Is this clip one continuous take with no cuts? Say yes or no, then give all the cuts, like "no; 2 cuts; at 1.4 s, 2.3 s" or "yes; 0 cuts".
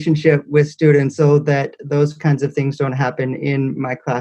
no; 1 cut; at 1.1 s